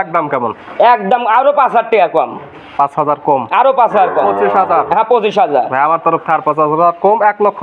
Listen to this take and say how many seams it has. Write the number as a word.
zero